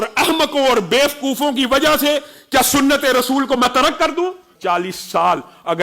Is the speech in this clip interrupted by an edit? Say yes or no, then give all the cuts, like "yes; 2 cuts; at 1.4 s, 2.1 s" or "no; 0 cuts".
yes; 1 cut; at 4.5 s